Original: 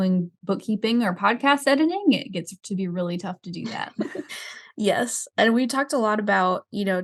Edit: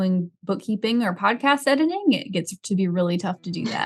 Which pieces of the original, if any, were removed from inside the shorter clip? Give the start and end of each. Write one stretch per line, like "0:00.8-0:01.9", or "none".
none